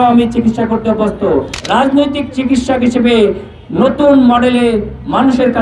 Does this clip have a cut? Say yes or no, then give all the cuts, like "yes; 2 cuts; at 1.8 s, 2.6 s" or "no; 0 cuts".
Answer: yes; 1 cut; at 1.5 s